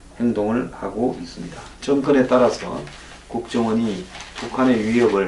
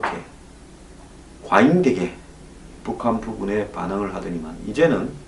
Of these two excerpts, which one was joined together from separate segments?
second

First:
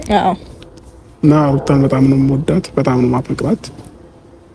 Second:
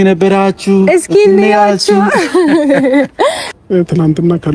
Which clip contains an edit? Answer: second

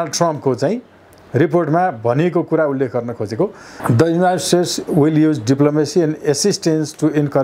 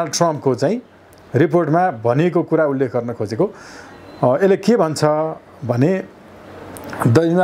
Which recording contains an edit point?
first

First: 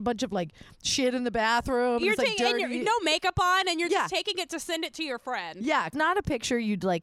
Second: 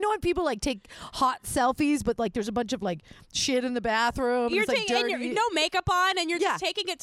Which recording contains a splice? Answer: first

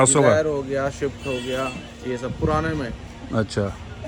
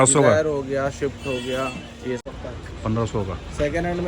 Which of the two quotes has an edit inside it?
second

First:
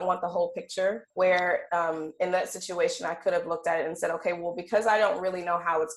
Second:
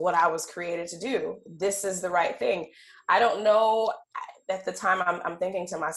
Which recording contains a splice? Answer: first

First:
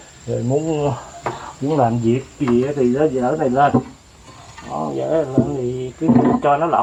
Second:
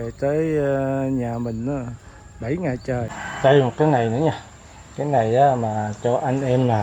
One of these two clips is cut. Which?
second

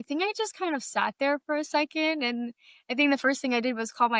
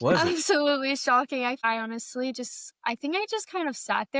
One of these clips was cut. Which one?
second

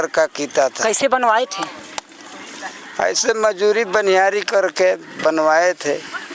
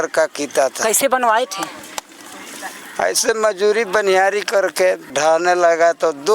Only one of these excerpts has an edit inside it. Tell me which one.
second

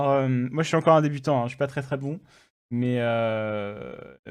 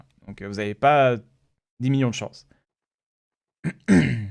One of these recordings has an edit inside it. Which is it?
second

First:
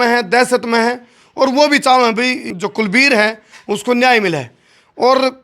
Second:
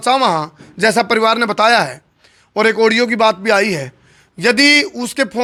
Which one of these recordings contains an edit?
first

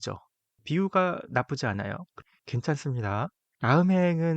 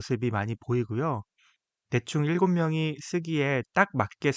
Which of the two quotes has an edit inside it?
first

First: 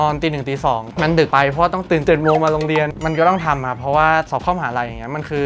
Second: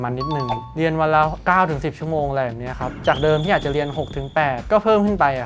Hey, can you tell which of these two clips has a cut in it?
first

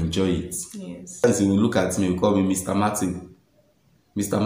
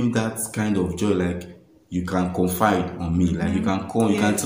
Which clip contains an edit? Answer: first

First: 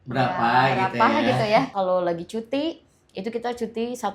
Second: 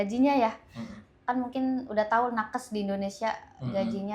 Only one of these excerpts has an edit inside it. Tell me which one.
first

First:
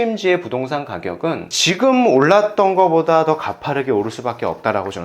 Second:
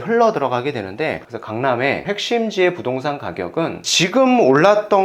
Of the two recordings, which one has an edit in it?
second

